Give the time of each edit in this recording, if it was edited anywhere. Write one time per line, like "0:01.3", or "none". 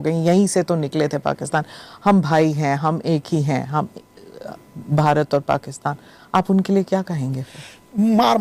none